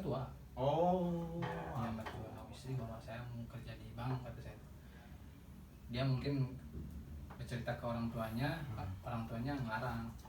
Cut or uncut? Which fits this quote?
cut